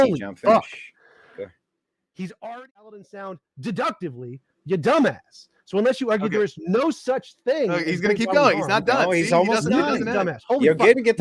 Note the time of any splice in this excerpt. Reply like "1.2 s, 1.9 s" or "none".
3.1 s